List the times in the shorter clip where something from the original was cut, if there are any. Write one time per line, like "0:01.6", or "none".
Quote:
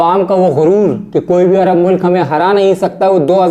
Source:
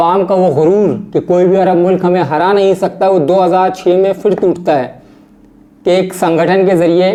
none